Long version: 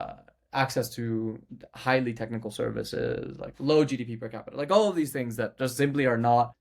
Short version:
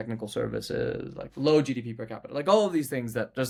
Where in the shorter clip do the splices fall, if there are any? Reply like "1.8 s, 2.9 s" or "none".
none